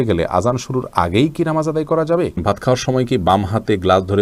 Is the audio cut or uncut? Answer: cut